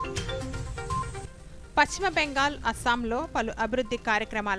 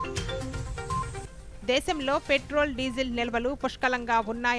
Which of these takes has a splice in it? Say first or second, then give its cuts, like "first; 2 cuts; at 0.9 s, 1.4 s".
second; 1 cut; at 1.2 s